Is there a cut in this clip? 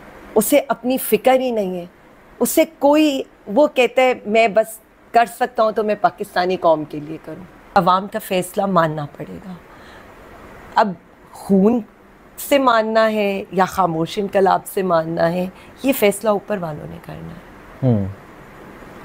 yes; 1 cut; at 7.7 s

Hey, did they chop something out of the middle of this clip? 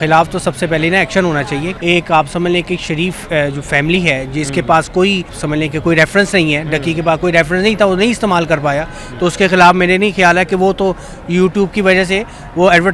yes; 2 cuts; at 1.7 s, 5.4 s

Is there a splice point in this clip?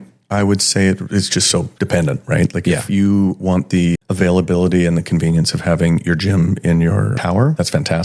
yes; 1 cut; at 1.7 s

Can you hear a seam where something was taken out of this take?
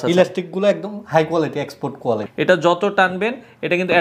yes; 1 cut; at 2.3 s

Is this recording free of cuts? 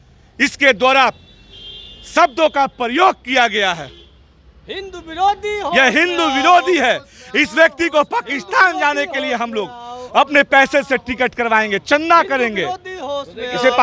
yes; 0 cuts

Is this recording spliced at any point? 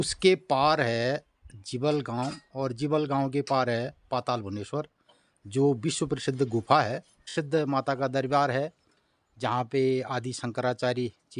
yes; 1 cut; at 7.2 s

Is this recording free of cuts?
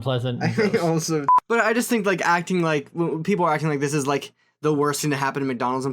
no; 1 cut; at 1.3 s

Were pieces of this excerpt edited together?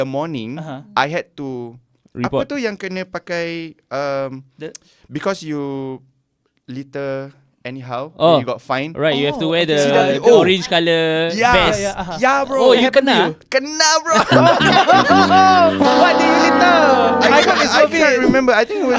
no; 0 cuts

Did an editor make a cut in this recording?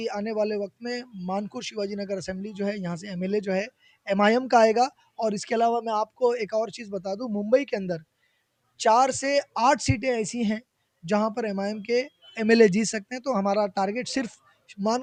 no; 0 cuts

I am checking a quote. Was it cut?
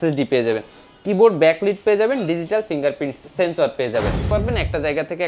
yes; 2 cuts; at 3.2 s, 4.3 s

